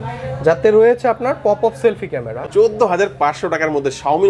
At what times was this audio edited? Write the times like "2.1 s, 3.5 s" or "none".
2.4 s